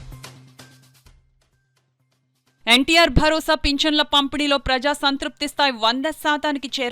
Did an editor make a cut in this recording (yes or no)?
yes